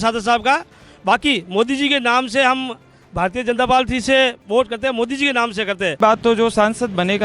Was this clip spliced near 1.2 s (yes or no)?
no